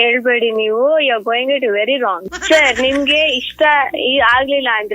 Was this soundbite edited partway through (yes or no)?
yes